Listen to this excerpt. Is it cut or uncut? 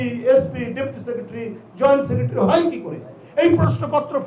uncut